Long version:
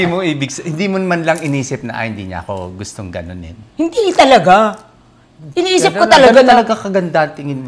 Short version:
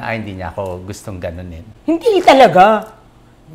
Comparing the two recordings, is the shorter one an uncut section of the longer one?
yes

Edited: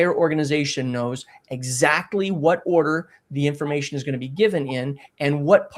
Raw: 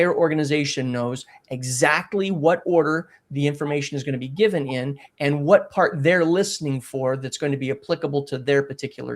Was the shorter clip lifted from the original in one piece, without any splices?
yes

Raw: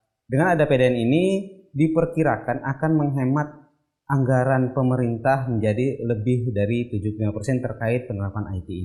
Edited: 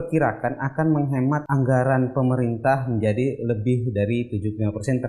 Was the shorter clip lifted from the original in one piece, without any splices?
no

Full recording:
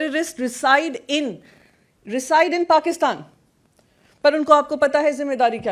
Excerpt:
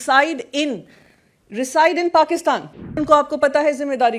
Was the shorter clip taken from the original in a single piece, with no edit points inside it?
no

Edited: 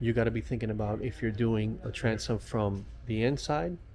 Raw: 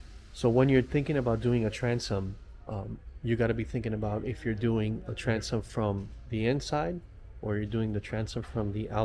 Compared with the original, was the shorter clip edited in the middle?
no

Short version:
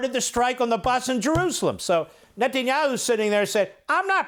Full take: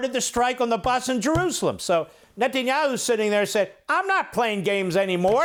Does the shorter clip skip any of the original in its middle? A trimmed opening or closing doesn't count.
no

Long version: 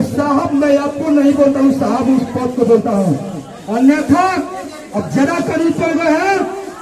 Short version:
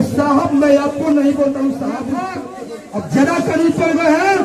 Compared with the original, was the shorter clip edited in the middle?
yes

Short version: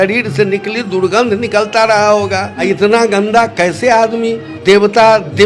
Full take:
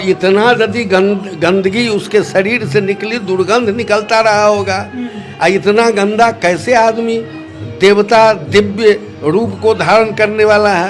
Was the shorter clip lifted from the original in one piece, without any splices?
no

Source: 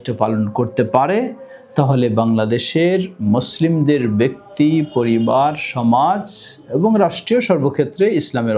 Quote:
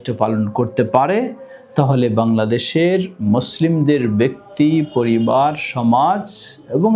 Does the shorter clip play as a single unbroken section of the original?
yes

